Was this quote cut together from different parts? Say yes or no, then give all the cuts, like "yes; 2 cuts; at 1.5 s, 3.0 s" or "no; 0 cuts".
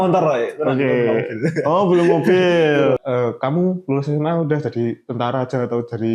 yes; 1 cut; at 3.0 s